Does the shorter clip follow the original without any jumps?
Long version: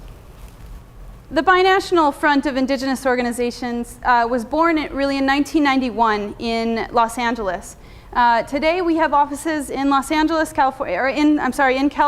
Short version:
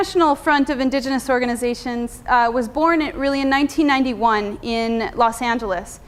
yes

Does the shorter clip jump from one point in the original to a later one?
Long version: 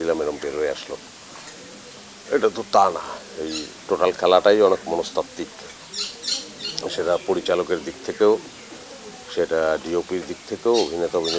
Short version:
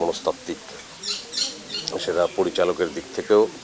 no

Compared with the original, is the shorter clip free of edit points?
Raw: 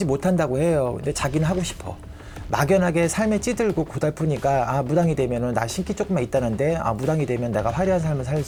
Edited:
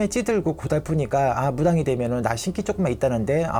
yes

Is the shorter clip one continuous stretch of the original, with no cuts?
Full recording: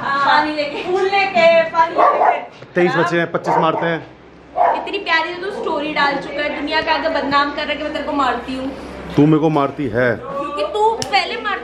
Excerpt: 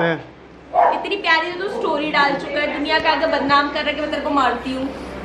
yes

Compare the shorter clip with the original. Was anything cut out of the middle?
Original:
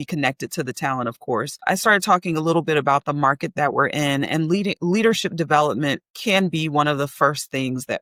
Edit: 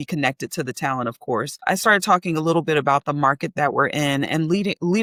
no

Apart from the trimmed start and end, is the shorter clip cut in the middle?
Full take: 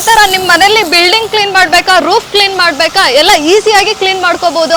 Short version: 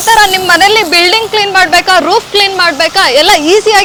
no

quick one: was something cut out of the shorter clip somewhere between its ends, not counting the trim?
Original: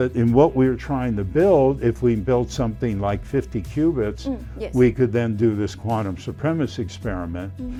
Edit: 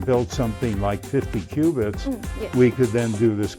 no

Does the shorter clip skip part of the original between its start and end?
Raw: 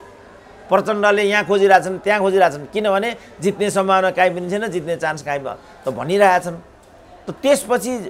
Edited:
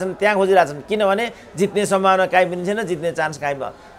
no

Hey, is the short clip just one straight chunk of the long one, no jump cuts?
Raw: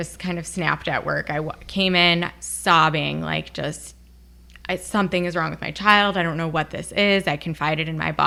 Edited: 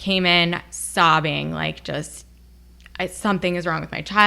yes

